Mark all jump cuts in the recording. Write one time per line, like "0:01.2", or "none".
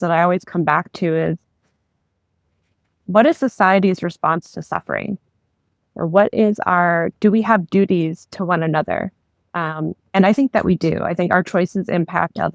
none

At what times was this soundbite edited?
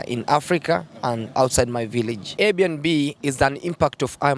0:02.4

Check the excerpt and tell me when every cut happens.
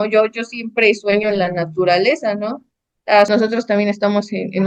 0:03.3

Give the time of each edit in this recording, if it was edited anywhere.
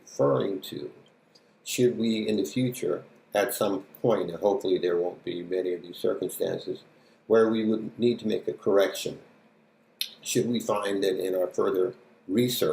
0:02.8

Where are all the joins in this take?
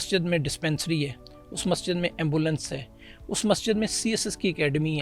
none

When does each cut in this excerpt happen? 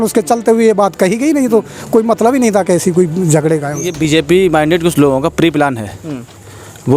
0:03.9

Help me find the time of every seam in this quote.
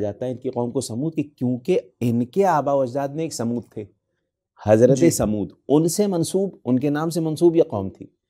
none

